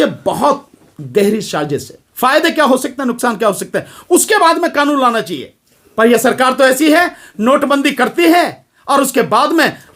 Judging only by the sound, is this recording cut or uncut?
cut